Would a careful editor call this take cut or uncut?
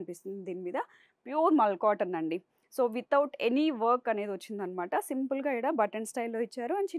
uncut